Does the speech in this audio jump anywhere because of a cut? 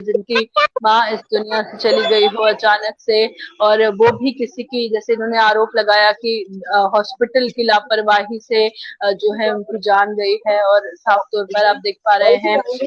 no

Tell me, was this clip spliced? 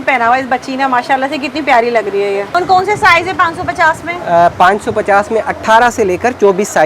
yes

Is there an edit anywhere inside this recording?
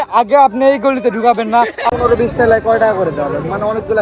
yes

